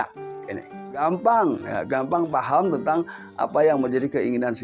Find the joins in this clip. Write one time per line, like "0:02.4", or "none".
0:01.0